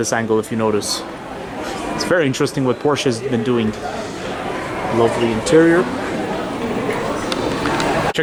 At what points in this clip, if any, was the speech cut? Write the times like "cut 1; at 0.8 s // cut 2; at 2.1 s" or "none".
none